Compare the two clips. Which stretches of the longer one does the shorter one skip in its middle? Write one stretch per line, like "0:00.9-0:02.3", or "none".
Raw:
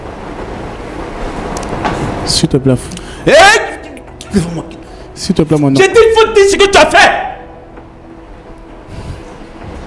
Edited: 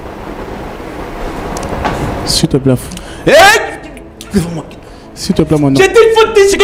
none